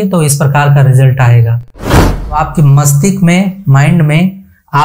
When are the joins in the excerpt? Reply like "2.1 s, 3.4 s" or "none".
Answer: 2.0 s